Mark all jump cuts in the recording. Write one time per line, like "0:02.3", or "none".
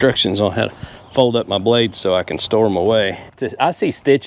0:03.3